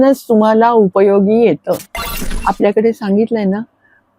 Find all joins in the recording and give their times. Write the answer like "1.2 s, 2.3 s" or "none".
2.3 s